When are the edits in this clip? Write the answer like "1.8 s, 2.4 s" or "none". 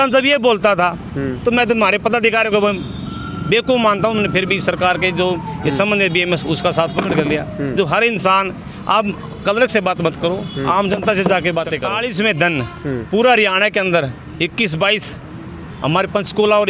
11.9 s